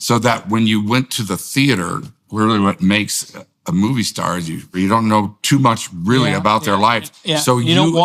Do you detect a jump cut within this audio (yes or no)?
yes